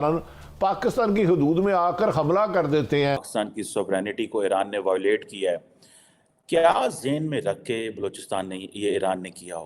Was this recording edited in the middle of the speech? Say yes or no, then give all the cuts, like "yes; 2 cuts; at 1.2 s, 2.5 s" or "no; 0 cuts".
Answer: yes; 1 cut; at 3.3 s